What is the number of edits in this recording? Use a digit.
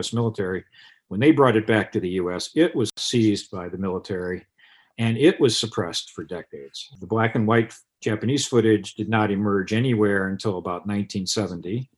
1